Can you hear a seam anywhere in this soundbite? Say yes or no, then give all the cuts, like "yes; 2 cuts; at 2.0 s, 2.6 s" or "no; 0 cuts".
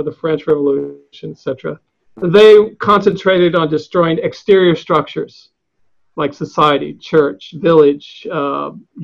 no; 0 cuts